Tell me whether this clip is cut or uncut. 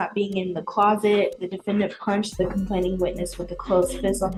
uncut